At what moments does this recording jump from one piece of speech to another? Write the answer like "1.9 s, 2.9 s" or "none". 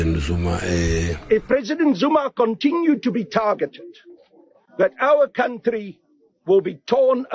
1.2 s